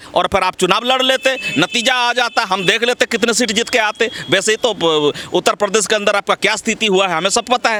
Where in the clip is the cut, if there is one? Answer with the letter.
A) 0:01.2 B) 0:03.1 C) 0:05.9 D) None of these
D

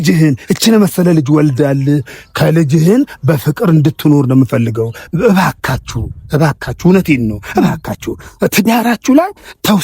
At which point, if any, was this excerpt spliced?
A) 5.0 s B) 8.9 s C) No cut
A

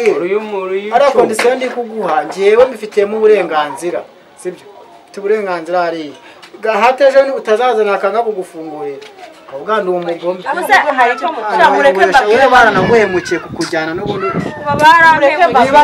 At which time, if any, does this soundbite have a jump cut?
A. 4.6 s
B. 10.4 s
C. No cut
B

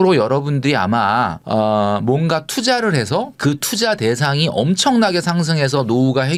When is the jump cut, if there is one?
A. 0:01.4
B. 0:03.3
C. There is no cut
C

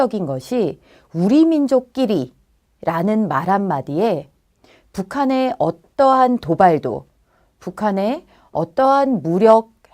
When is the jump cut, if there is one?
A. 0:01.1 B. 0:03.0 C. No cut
B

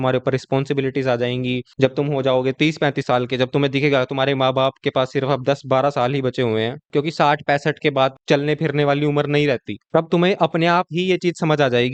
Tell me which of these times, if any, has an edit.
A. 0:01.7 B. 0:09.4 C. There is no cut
C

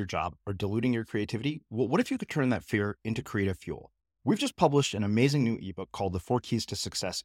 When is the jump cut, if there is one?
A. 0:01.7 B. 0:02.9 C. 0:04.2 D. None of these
D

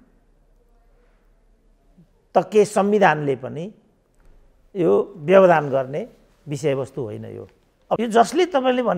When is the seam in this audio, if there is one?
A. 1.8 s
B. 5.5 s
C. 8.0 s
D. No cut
C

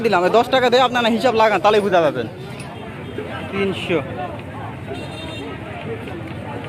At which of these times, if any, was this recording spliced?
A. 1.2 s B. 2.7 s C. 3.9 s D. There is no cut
B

